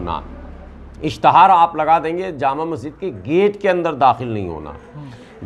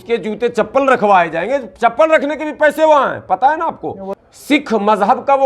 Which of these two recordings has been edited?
second; 1 cut; at 4.1 s

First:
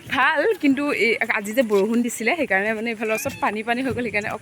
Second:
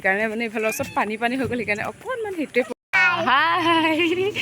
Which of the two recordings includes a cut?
second; 1 cut; at 2.9 s

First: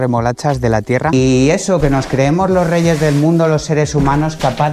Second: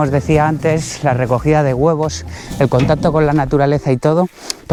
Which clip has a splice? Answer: first; 1 cut; at 1.1 s

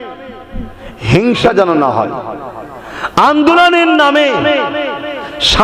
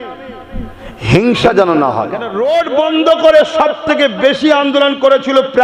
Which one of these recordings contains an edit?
second; 1 cut; at 2.3 s

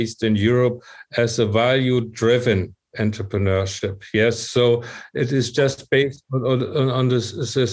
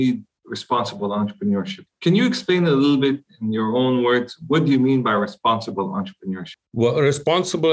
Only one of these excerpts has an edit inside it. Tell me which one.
second; 2 cuts; at 1.8 s, 6.6 s

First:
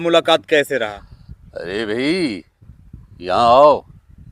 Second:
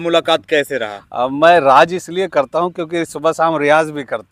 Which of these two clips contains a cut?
first; 1 cut; at 1.0 s

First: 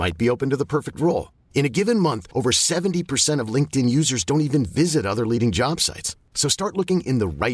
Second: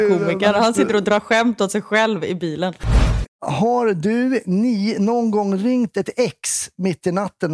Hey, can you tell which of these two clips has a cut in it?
second; 1 cut; at 3.1 s

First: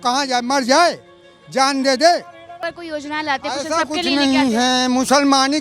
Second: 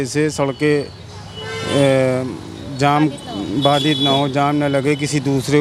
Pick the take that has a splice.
first; 1 cut; at 2.6 s

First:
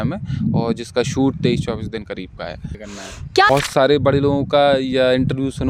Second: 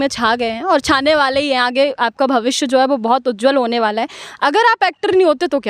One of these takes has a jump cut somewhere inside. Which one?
first; 1 cut; at 3.2 s

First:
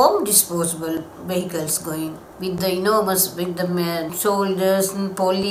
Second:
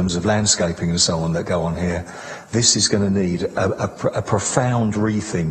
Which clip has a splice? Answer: first; 2 cuts; at 2.3 s, 4.1 s

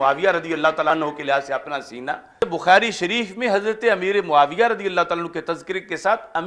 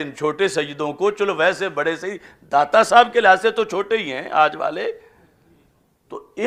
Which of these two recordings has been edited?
first; 2 cuts; at 0.9 s, 2.4 s

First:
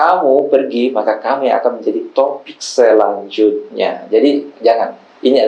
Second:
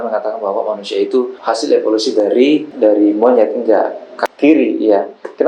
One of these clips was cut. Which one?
second; 2 cuts; at 1.4 s, 4.2 s

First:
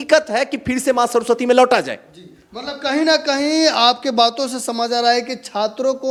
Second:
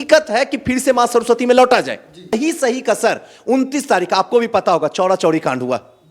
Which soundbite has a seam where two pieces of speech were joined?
second; 1 cut; at 2.3 s

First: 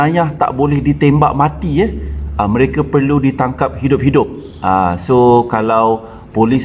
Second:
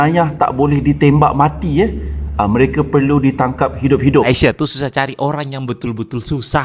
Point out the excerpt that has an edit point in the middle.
second; 1 cut; at 4.3 s

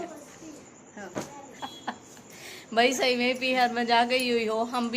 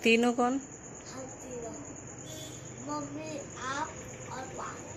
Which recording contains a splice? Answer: first; 1 cut; at 1.4 s

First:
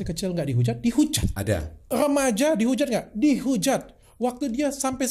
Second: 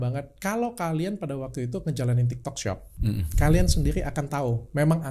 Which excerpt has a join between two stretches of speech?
first; 2 cuts; at 1.9 s, 4.0 s

